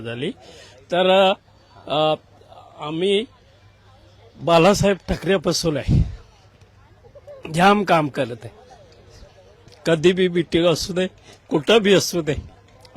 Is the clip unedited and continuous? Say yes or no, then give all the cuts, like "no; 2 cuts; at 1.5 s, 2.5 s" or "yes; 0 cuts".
yes; 0 cuts